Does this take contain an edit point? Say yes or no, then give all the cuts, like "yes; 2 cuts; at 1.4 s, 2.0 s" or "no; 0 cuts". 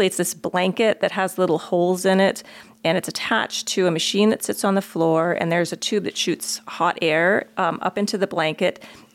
no; 0 cuts